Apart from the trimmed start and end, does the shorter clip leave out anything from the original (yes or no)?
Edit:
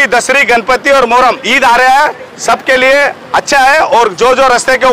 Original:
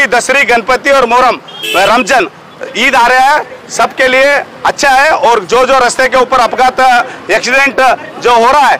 yes